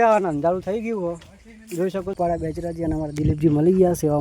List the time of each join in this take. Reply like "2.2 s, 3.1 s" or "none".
2.1 s

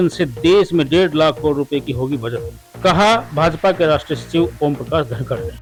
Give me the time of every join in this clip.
none

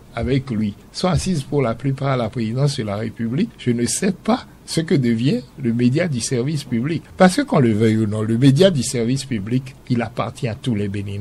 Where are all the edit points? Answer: 0.9 s, 3.6 s, 4.6 s, 7.0 s, 9.7 s

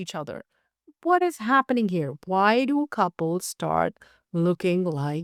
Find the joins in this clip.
none

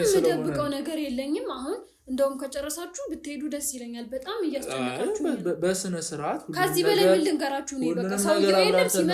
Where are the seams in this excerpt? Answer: none

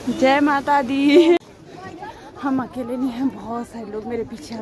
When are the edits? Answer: 1.4 s

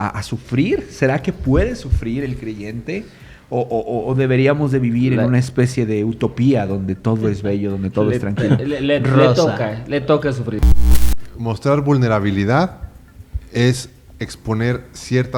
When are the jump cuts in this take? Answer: 11.0 s

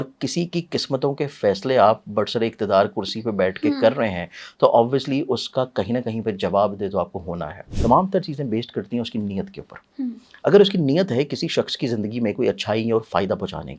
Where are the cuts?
7.6 s

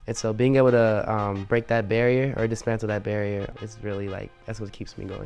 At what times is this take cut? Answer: 3.5 s

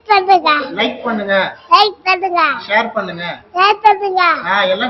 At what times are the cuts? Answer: none

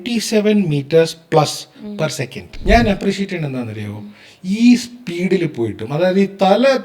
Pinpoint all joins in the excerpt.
2.5 s

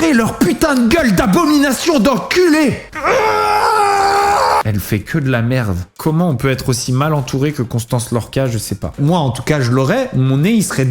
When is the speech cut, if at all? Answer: 2.9 s, 4.6 s, 9.0 s

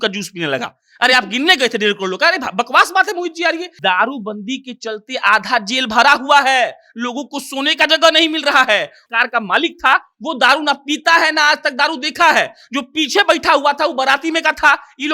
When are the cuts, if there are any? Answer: 3.7 s, 9.0 s

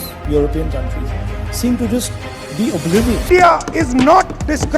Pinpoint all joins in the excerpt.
3.3 s

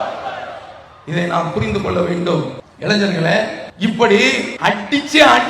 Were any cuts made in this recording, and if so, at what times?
2.6 s, 3.6 s, 4.5 s

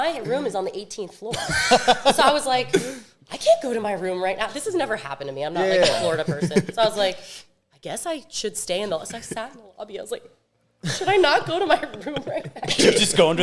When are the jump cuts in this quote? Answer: none

